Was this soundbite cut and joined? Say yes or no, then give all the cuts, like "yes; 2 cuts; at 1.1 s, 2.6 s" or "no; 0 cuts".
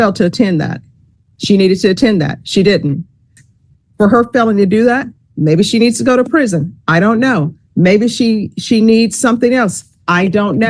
yes; 1 cut; at 3.4 s